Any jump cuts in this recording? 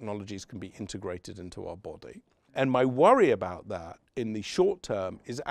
yes; 1 cut; at 2.5 s

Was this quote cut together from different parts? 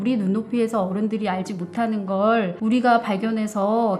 yes; 1 cut; at 2.5 s

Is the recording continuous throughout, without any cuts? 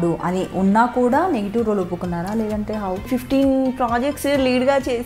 no; 1 cut; at 3.0 s

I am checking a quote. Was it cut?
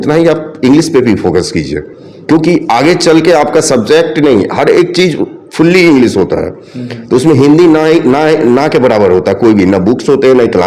no; 0 cuts

